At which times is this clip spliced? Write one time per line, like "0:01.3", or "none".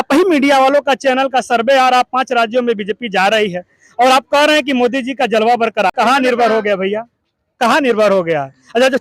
0:05.9